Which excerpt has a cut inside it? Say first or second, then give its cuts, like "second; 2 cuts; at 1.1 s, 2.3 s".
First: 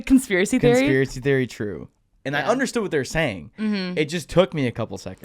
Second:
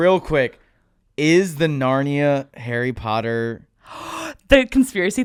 first; 1 cut; at 2.1 s